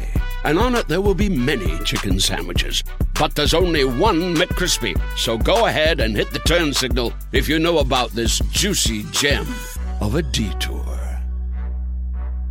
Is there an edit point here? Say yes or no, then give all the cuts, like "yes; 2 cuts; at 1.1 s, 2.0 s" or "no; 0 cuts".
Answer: no; 0 cuts